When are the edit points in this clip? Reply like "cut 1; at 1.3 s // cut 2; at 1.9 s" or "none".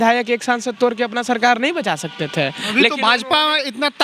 none

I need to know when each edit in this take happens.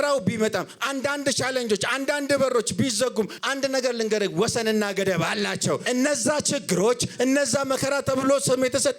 cut 1; at 3.4 s // cut 2; at 5.8 s

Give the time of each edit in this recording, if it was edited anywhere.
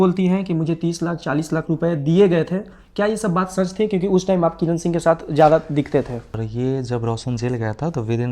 cut 1; at 6.4 s

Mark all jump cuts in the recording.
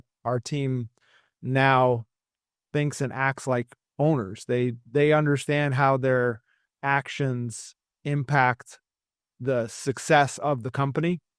none

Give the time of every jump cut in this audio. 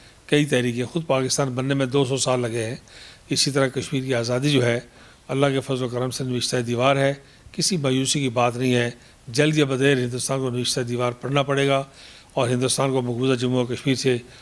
cut 1; at 11.3 s

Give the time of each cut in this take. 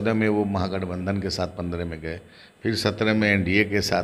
none

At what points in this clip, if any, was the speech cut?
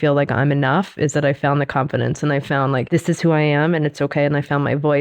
cut 1; at 2.9 s

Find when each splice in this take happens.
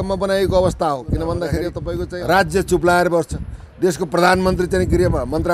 cut 1; at 1.8 s

